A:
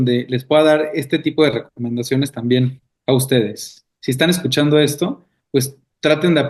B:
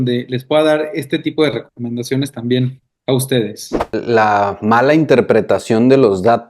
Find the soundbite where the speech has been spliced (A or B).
B